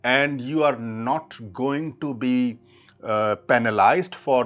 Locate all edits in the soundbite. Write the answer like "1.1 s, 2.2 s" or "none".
none